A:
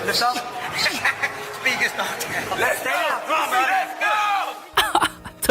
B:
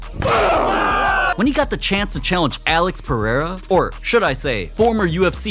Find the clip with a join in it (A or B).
B